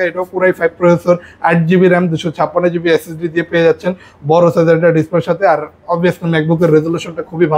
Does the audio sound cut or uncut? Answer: uncut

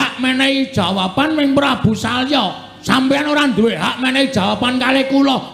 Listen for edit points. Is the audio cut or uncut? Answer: cut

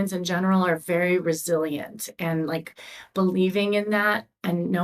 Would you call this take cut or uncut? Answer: uncut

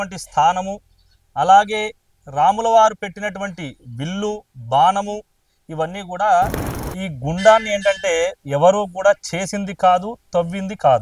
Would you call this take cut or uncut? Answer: cut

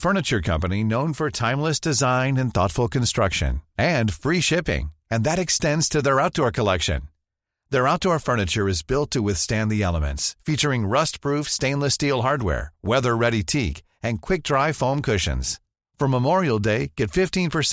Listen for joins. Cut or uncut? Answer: uncut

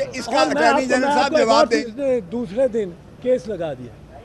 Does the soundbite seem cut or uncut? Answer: cut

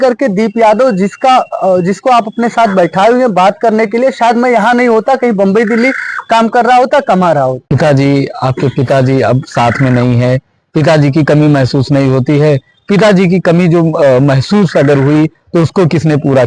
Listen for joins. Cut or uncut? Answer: cut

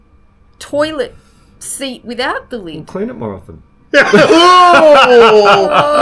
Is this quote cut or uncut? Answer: uncut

